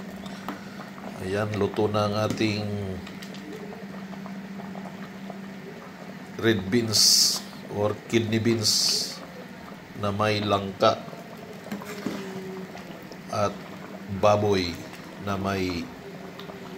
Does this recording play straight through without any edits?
yes; 0 cuts

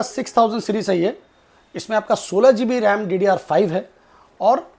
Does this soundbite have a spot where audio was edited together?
no; 0 cuts

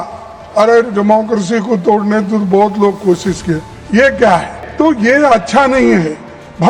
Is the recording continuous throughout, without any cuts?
no; 1 cut; at 4.6 s

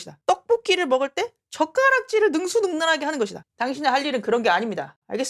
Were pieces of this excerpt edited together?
yes; 1 cut; at 3.4 s

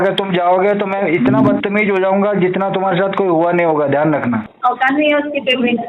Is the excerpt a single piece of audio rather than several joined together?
no; 1 cut; at 4.5 s

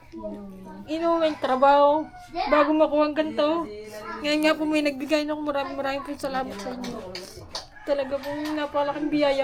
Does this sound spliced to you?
no; 0 cuts

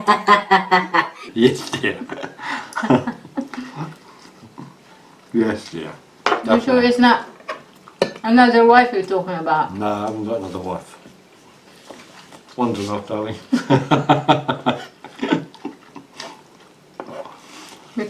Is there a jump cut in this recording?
no; 0 cuts

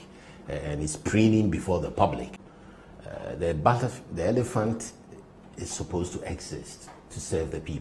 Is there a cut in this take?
yes; 1 cut; at 2.4 s

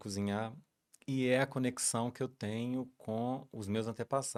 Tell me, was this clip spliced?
no; 0 cuts

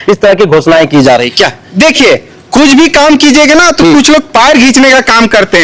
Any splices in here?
no; 0 cuts

